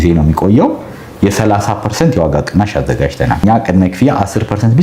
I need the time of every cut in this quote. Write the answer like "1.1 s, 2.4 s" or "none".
3.4 s